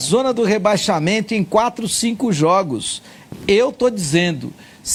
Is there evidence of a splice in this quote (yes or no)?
no